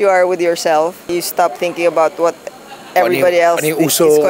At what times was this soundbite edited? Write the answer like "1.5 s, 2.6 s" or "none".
1.1 s